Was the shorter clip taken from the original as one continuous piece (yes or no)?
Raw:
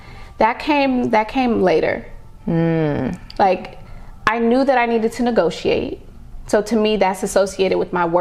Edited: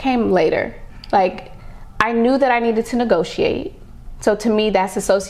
no